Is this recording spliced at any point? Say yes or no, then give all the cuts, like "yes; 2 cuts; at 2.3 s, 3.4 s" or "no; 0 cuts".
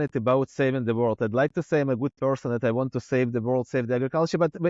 no; 0 cuts